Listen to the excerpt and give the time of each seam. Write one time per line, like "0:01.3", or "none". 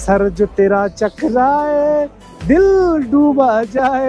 none

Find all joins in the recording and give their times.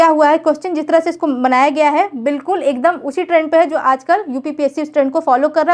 none

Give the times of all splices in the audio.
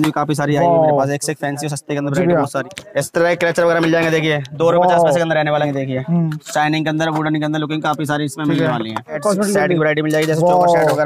0:02.6
0:05.7
0:09.2

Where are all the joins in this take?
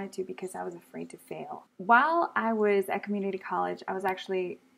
0:01.7

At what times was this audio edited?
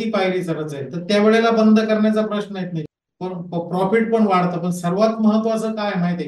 0:02.8

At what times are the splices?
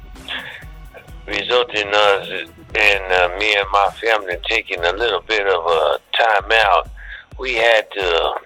none

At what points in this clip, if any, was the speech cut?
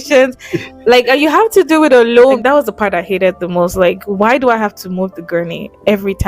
0:02.4

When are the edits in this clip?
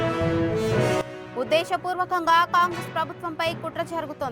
0:01.0

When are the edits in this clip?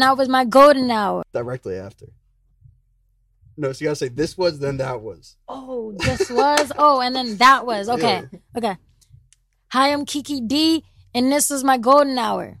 0:01.2

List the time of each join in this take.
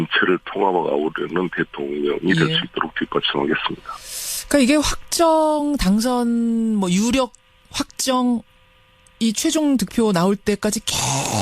0:05.9

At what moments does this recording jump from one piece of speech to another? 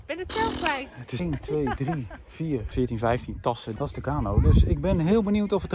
0:01.2
0:02.7
0:03.7

